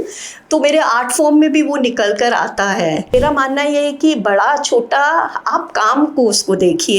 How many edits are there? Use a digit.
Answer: 1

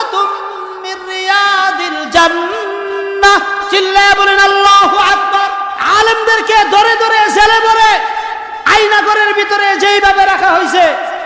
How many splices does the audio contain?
1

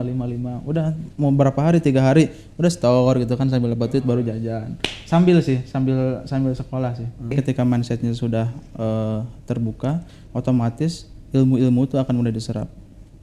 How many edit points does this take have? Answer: 1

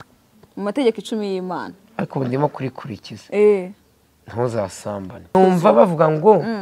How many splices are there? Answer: 1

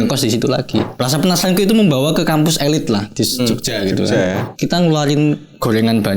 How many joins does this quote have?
2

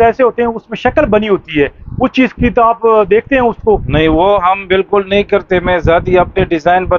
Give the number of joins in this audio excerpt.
0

